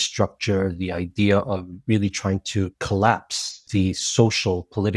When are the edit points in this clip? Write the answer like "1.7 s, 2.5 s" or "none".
2.8 s, 3.6 s